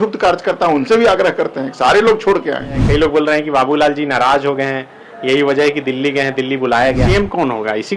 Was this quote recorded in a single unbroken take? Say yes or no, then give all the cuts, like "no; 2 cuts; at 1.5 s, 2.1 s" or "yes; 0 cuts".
no; 2 cuts; at 2.8 s, 7.0 s